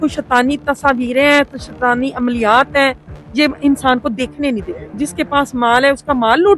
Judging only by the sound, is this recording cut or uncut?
cut